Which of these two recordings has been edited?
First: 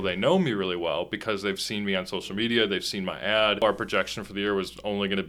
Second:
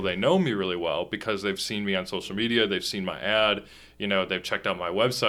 first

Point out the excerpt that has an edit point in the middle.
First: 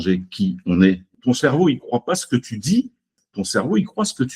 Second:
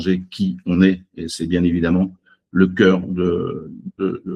first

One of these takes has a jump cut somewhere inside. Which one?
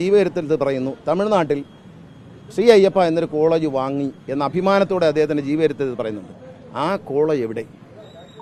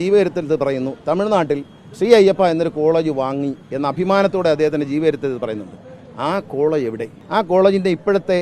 second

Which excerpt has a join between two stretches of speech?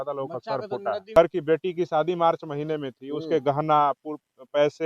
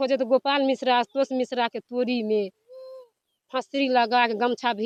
first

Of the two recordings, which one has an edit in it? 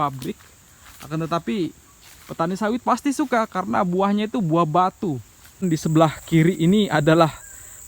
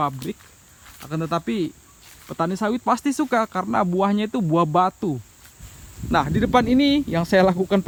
first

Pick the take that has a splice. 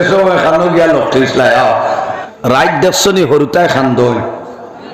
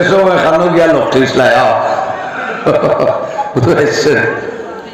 first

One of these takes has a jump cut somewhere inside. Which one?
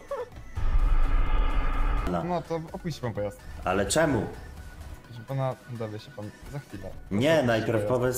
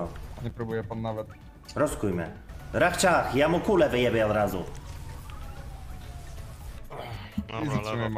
first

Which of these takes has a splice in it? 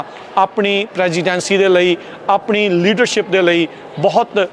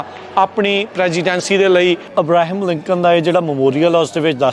second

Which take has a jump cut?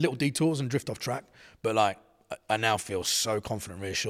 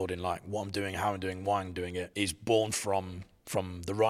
second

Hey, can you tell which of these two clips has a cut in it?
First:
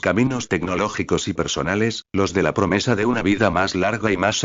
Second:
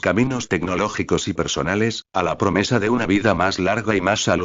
second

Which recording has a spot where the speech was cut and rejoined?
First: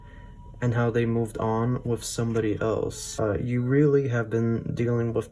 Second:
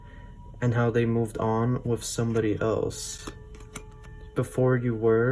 first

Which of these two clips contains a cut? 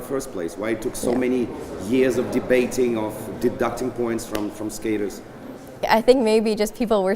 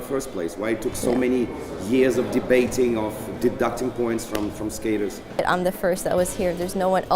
second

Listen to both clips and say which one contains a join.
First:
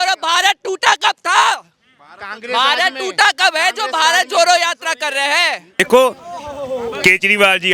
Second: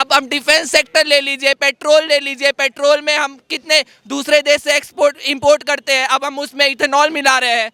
first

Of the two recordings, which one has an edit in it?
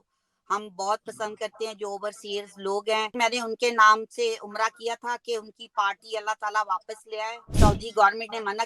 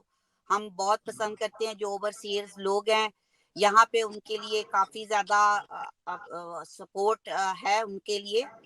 first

